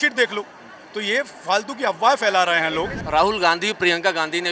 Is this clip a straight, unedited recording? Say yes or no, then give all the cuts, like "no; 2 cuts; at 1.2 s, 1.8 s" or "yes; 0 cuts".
no; 1 cut; at 3.0 s